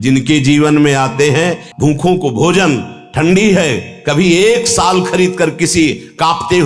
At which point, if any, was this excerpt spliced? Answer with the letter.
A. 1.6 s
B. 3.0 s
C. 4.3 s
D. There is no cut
A